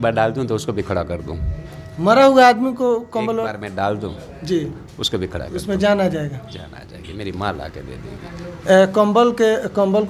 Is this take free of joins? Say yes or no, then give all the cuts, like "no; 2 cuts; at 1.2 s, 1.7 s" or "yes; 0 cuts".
yes; 0 cuts